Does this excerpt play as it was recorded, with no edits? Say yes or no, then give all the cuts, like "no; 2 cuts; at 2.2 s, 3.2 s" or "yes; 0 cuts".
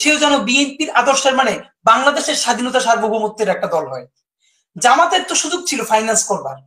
yes; 0 cuts